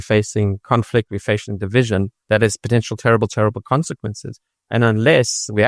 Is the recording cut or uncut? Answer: cut